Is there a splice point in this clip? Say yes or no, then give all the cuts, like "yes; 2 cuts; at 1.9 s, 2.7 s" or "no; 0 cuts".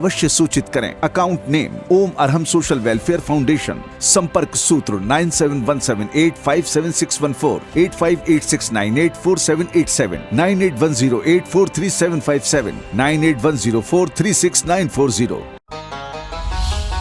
yes; 1 cut; at 15.6 s